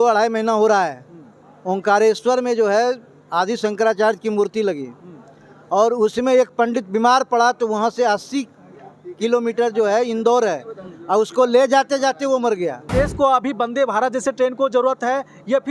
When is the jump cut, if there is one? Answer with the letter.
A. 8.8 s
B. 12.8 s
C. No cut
B